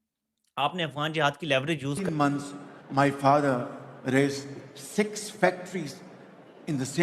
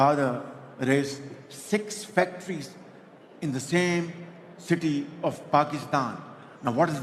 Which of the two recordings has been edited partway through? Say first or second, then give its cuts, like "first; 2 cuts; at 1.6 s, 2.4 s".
first; 1 cut; at 2.0 s